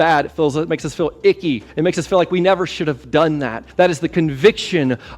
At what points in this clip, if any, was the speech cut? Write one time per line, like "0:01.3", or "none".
0:01.7
0:03.6